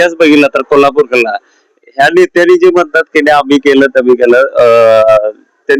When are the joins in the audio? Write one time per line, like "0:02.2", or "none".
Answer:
none

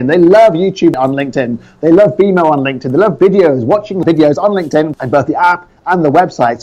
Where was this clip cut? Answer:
0:00.9
0:04.0
0:05.0

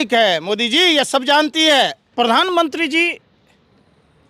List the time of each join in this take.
0:02.0

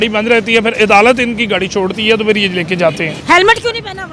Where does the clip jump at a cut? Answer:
0:03.1

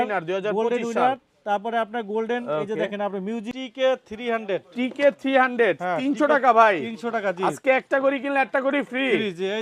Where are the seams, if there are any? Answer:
0:03.6

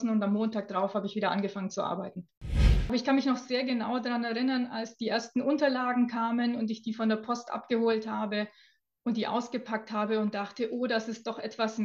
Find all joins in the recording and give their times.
0:02.8

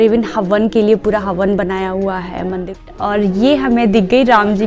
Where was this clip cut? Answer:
0:02.9

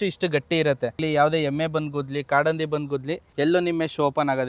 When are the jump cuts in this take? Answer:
0:01.0
0:03.2

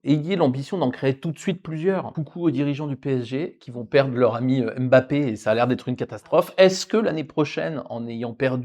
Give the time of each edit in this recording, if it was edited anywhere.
0:02.2

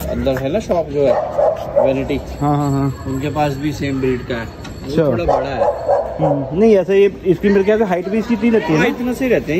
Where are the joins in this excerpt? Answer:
none

